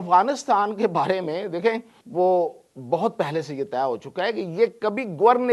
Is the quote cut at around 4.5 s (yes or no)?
no